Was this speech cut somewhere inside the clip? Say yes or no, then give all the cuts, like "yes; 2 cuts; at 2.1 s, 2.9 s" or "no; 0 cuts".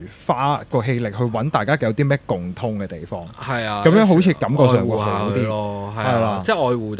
no; 0 cuts